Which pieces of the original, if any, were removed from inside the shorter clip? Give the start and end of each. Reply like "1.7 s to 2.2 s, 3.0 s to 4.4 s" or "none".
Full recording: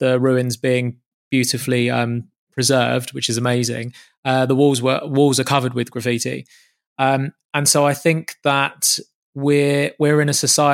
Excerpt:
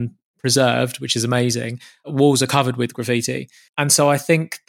4.2 s to 5.0 s, 6.6 s to 7.4 s

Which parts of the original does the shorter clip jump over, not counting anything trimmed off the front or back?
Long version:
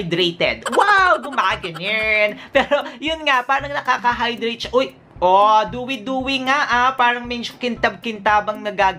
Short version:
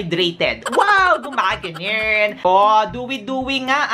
2.4 s to 5.1 s

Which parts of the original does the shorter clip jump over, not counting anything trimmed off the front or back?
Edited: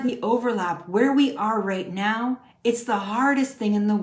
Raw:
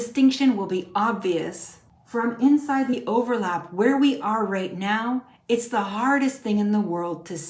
none

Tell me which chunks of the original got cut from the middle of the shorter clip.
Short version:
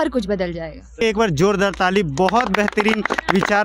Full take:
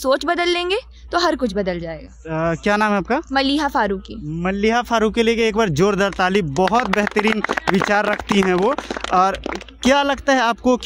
2.3 s to 5.4 s

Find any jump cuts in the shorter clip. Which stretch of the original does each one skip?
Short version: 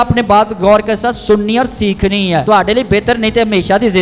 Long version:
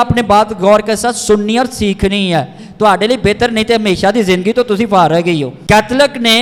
2.4 s to 2.8 s

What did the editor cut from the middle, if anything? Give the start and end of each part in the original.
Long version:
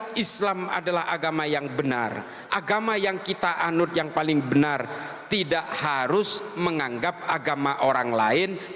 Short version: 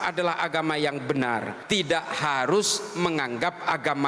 2.2 s to 5.2 s

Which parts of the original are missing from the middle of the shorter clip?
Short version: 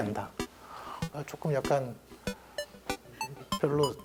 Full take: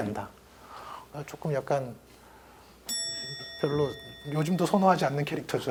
none

